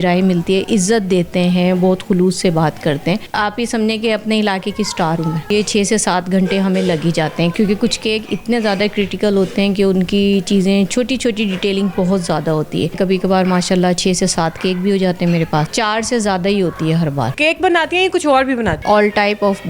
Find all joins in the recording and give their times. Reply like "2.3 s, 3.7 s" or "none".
3.3 s, 5.5 s, 7.5 s, 12.9 s, 15.7 s, 17.3 s, 18.8 s